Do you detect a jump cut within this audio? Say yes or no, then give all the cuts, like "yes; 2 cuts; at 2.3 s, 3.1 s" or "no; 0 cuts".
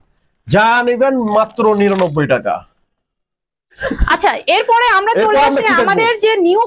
no; 0 cuts